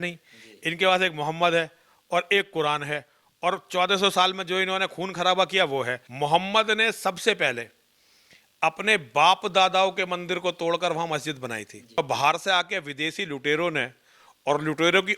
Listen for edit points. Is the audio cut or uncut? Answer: cut